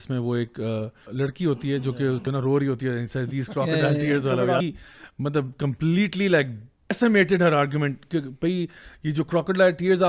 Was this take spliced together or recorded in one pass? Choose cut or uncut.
cut